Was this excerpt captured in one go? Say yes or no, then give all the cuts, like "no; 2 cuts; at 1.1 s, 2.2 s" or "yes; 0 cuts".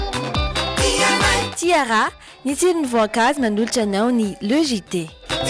yes; 0 cuts